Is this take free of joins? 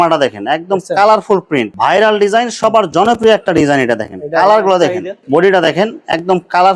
no; 2 cuts; at 1.7 s, 5.1 s

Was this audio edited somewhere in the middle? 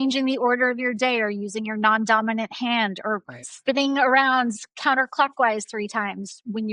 no; 0 cuts

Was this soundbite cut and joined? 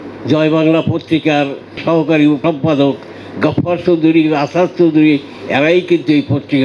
yes; 2 cuts; at 1.8 s, 2.4 s

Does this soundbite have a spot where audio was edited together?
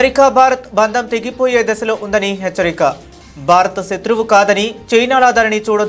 no; 0 cuts

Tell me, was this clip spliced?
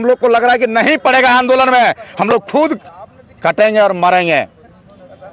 no; 0 cuts

